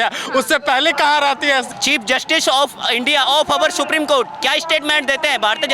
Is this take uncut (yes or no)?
no